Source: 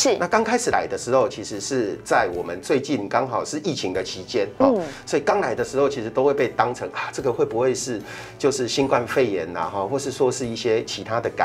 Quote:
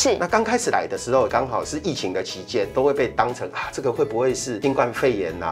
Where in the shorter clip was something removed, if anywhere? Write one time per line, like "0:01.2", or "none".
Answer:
0:01.3
0:02.7
0:04.6